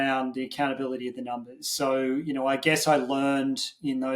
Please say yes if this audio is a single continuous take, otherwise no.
yes